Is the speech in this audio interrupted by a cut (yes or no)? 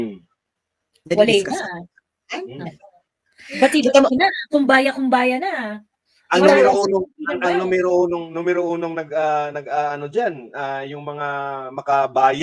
no